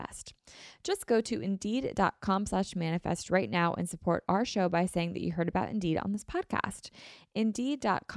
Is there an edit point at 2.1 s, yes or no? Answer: no